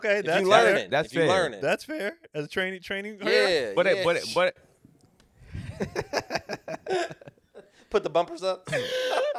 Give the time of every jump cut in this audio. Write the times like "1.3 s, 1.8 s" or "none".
none